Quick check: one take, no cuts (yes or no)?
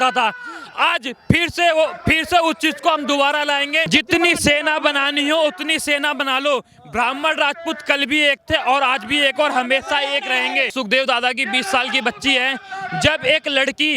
no